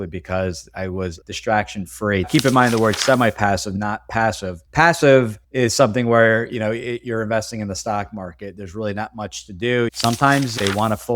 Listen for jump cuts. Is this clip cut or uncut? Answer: cut